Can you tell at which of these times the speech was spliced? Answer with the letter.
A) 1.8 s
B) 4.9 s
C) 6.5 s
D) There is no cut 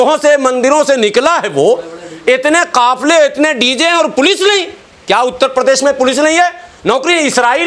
D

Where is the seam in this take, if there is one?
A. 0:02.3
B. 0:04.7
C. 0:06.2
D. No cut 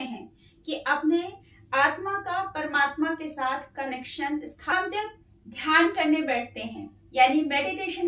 B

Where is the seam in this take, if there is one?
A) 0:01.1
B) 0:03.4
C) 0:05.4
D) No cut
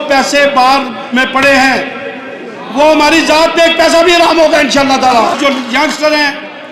C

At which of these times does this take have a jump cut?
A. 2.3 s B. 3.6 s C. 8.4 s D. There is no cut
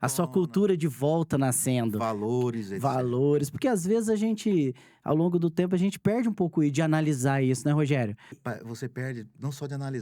C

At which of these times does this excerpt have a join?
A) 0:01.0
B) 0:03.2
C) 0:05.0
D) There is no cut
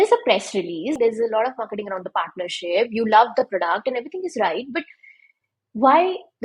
A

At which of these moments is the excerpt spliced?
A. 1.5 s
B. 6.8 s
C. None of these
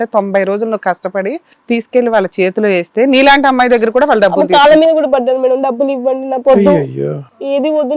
A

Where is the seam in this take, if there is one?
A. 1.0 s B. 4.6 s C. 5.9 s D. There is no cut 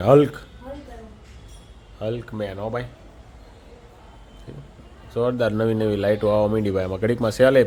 D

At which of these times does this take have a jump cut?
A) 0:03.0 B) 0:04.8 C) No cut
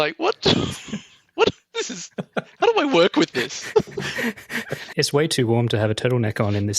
B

